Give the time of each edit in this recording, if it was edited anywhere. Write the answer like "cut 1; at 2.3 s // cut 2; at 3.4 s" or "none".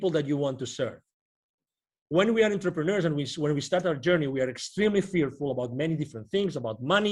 none